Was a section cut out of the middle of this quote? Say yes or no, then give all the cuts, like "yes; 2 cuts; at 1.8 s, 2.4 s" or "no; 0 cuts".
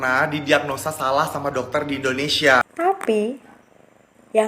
yes; 1 cut; at 2.7 s